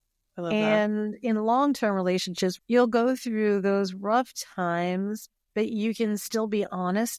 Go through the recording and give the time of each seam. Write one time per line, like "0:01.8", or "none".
0:02.5